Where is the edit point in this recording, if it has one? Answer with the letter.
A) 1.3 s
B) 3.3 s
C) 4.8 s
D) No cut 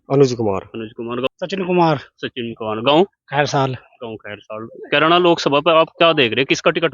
A